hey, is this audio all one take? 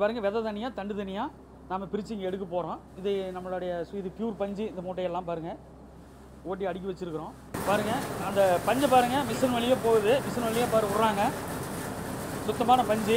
no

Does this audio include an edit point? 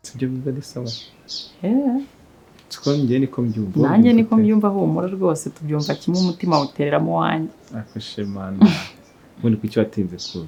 no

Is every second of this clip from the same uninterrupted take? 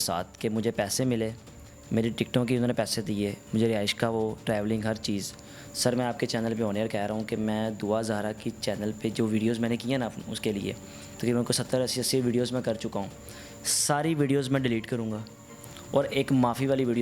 yes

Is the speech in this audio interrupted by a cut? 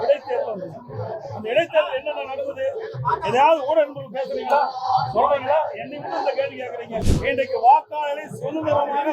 yes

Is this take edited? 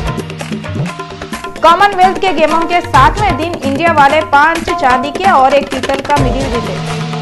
no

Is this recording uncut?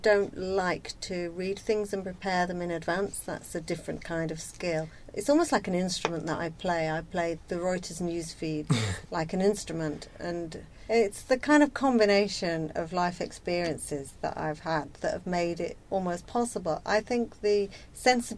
no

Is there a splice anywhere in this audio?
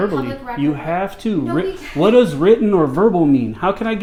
no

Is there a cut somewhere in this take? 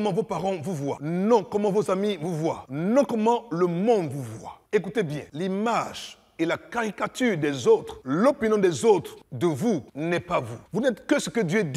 yes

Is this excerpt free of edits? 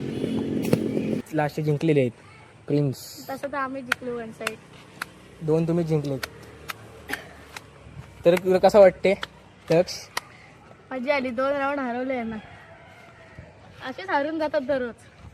no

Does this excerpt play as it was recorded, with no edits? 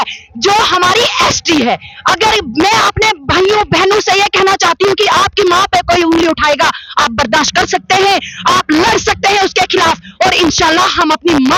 yes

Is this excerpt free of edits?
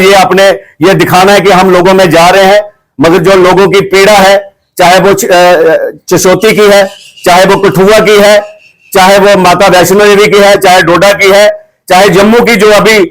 yes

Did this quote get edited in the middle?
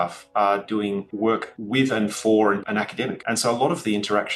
yes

